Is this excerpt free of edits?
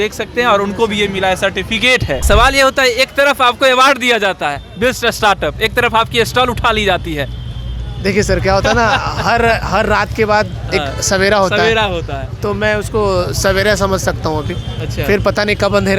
no; 1 cut; at 2.2 s

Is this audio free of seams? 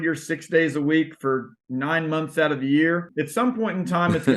no; 1 cut; at 3.1 s

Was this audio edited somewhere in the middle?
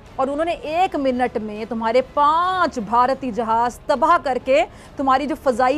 no; 0 cuts

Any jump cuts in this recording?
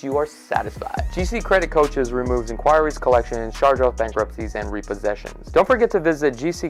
no; 0 cuts

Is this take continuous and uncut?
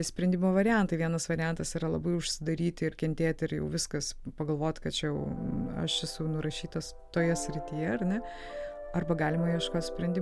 no; 1 cut; at 7.0 s

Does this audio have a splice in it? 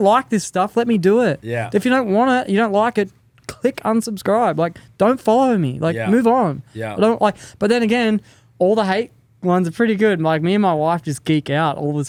no; 0 cuts

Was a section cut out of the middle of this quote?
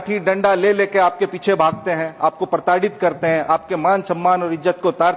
no; 0 cuts

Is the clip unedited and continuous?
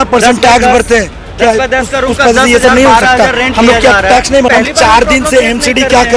no; 1 cut; at 4.5 s

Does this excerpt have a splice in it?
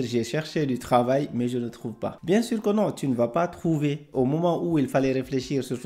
yes; 1 cut; at 2.1 s

